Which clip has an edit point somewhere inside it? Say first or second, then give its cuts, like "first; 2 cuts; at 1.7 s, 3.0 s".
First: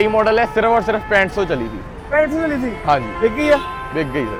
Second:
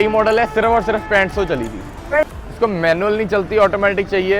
second; 1 cut; at 2.3 s